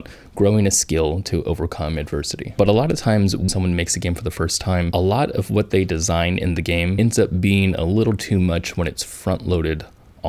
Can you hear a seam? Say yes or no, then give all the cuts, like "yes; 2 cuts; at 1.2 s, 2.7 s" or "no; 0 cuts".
yes; 2 cuts; at 3.5 s, 6.9 s